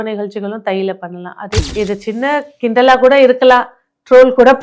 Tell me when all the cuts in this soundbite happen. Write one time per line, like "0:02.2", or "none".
0:01.6